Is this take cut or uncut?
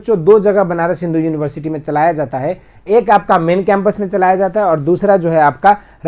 uncut